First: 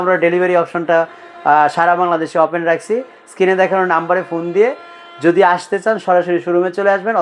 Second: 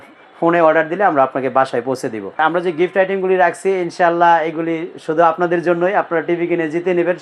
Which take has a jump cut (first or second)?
second